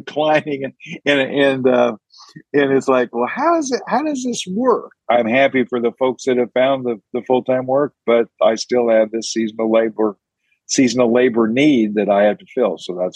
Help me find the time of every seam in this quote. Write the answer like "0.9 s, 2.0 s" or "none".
4.9 s

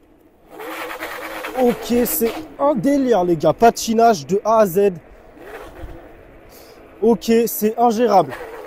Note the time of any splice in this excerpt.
none

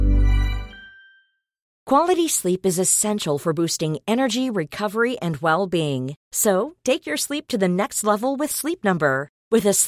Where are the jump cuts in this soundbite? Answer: 1.7 s

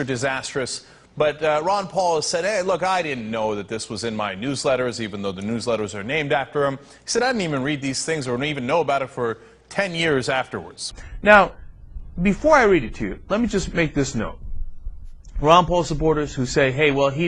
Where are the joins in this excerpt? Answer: none

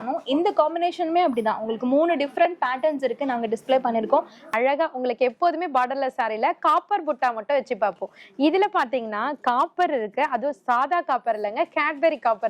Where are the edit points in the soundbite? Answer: 4.4 s

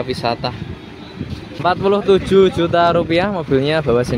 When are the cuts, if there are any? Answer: 1.6 s

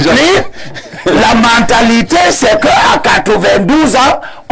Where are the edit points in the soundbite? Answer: none

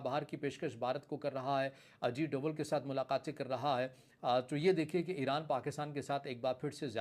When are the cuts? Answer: 2.0 s

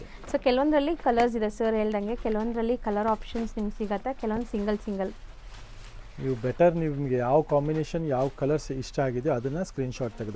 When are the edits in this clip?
none

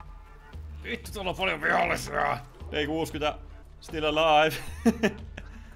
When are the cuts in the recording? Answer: 2.5 s

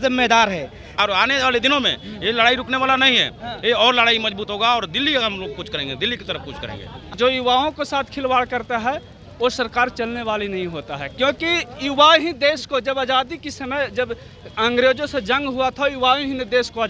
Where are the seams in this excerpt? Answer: 1.1 s, 7.1 s

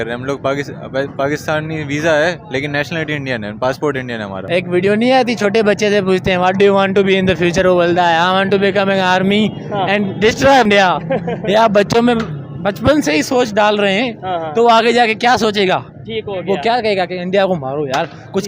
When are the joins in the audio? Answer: 4.4 s, 10.7 s

